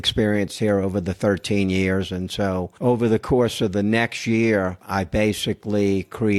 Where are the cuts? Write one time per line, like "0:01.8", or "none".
0:02.7
0:04.8